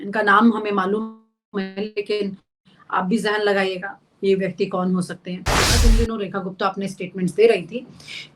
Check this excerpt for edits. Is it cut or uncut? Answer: cut